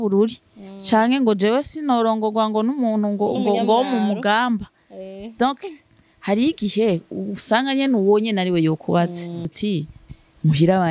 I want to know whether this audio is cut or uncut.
cut